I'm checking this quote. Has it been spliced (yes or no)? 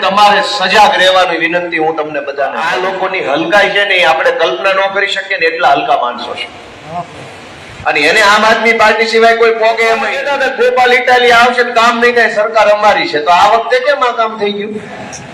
yes